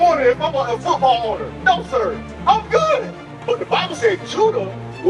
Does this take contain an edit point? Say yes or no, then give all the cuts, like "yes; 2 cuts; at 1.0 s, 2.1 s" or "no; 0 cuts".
yes; 1 cut; at 3.4 s